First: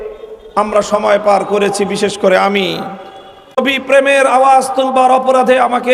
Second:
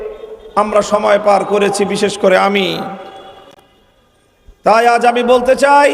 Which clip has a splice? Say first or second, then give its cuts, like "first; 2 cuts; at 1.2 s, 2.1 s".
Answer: first; 1 cut; at 3.5 s